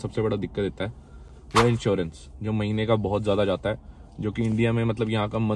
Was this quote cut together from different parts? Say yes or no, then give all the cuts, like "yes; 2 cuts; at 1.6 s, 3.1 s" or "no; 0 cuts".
no; 0 cuts